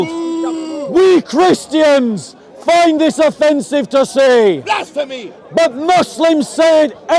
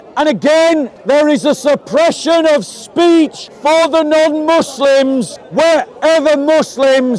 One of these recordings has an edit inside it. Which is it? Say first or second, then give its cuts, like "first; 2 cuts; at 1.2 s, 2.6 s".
second; 3 cuts; at 1.0 s, 3.5 s, 5.4 s